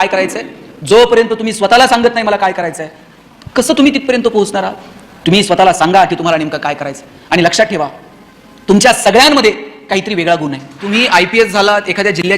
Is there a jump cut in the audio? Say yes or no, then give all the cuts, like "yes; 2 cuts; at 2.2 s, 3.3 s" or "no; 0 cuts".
yes; 1 cut; at 10.9 s